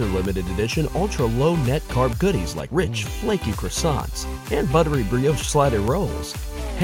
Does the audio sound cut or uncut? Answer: uncut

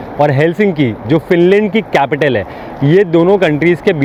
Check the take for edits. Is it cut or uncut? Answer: uncut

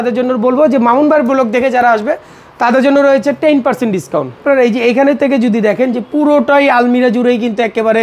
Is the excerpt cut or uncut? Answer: cut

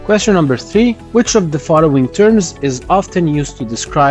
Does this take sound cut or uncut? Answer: cut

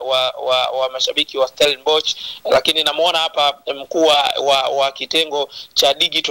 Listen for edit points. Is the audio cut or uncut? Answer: uncut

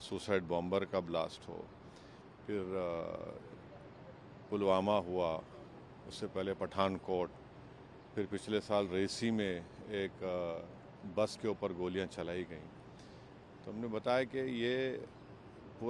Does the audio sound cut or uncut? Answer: uncut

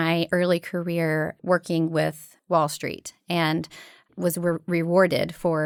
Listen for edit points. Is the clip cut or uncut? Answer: uncut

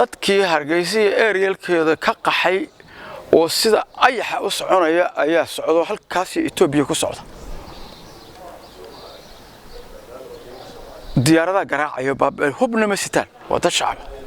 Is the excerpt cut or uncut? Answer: uncut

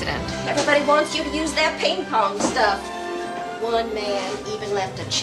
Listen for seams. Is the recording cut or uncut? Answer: uncut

